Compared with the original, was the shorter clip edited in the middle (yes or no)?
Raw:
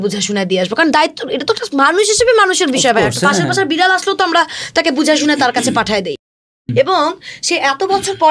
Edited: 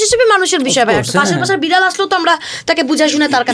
no